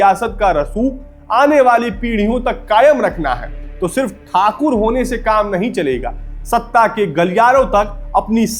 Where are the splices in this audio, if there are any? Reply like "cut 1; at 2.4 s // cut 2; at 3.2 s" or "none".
none